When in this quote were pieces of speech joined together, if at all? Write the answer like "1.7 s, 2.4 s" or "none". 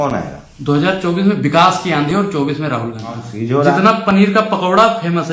3.3 s